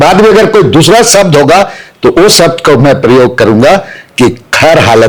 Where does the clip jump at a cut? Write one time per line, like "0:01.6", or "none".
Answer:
none